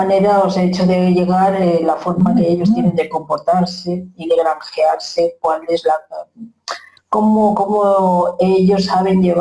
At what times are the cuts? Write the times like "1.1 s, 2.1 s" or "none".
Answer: none